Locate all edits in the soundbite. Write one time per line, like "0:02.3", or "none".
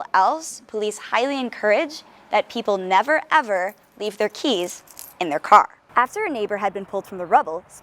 0:05.8